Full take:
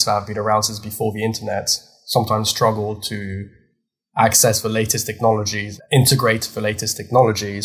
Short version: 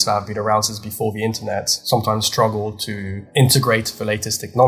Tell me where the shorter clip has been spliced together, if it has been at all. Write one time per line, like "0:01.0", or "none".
0:01.8
0:03.1